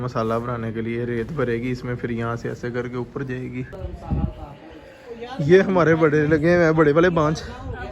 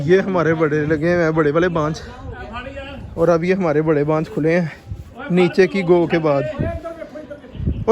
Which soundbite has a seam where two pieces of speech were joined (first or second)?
first